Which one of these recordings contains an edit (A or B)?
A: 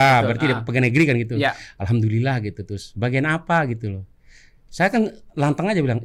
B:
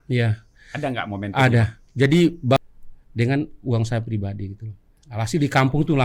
B